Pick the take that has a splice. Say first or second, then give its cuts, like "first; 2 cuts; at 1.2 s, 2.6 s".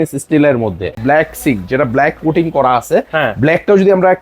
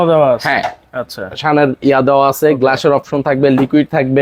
first; 1 cut; at 1.0 s